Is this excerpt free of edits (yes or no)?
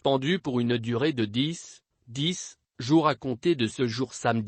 yes